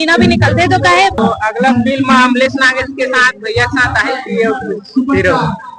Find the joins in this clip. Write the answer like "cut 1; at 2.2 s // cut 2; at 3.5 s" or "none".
cut 1; at 1.2 s